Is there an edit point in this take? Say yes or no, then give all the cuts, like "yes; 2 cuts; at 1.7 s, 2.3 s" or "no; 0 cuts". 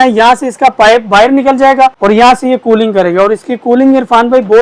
yes; 1 cut; at 2.0 s